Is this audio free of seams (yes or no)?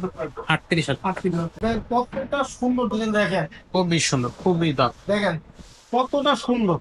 no